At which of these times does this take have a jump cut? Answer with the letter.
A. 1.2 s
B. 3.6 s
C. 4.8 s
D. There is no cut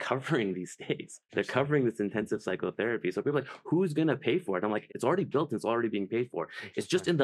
A